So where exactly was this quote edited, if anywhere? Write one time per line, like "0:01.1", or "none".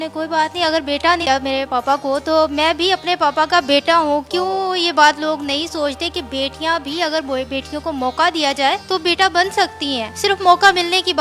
0:01.2